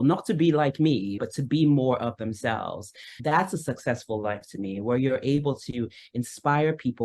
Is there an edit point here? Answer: yes; 2 cuts; at 1.2 s, 3.2 s

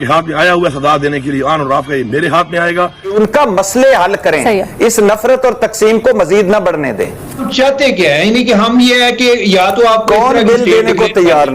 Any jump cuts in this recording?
yes; 2 cuts; at 3.1 s, 7.5 s

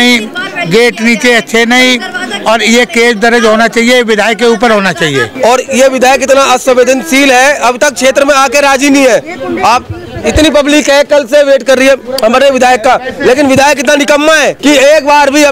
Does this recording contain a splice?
yes; 2 cuts; at 5.3 s, 14.6 s

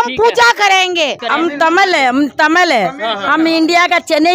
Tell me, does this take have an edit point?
yes; 1 cut; at 1.2 s

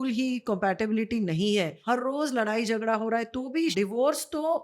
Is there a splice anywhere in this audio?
yes; 2 cuts; at 1.8 s, 3.7 s

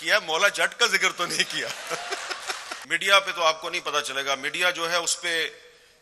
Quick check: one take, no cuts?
no; 1 cut; at 2.7 s

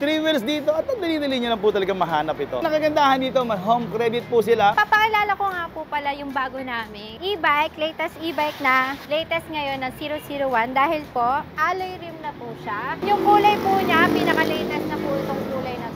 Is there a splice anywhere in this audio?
yes; 6 cuts; at 2.6 s, 4.7 s, 7.0 s, 9.0 s, 11.5 s, 13.0 s

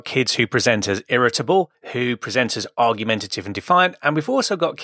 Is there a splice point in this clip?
yes; 1 cut; at 1.8 s

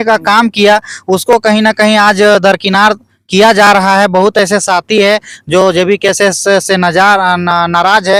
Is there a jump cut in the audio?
no; 0 cuts

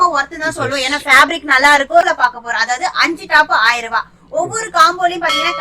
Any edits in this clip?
yes; 1 cut; at 2.0 s

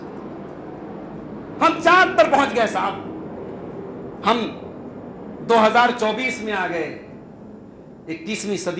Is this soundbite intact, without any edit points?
yes; 0 cuts

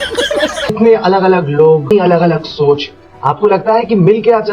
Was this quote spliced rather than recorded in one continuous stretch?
yes; 2 cuts; at 0.7 s, 1.9 s

